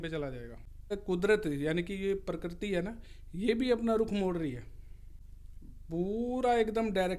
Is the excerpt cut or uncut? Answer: cut